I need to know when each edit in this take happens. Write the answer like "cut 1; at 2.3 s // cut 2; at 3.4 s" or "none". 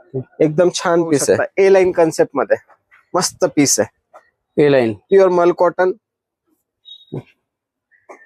cut 1; at 1.5 s